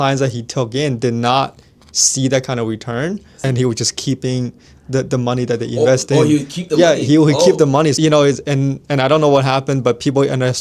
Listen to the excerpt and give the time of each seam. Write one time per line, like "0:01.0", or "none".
0:03.3
0:08.0